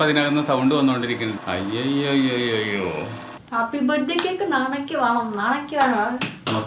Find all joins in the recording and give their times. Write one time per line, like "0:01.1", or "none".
0:01.4
0:03.2